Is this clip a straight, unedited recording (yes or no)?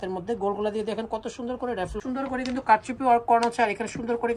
no